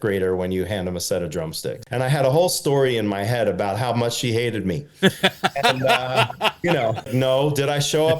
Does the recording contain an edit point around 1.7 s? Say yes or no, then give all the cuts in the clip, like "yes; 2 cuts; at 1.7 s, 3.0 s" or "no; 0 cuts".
yes; 2 cuts; at 1.7 s, 7.1 s